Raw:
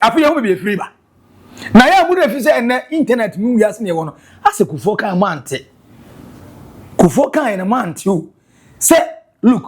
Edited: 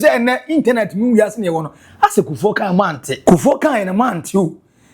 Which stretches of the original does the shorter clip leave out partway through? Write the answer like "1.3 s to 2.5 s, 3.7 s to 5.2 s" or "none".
5.5 s to 6.8 s